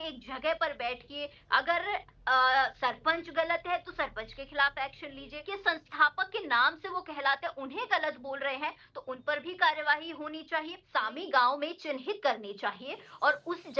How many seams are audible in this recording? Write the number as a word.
two